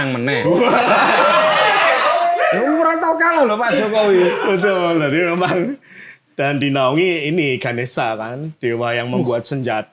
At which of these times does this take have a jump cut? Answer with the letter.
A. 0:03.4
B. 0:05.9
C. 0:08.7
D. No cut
D